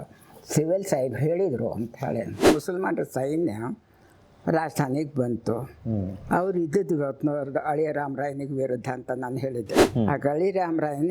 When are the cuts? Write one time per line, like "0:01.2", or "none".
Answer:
0:02.4
0:09.8